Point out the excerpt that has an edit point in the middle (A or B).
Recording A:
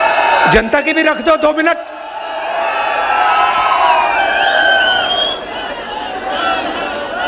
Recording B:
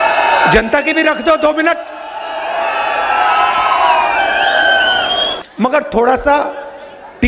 B